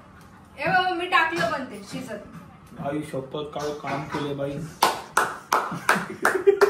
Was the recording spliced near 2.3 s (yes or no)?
no